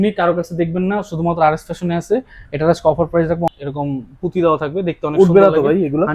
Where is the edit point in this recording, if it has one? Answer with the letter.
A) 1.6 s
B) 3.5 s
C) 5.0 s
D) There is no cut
B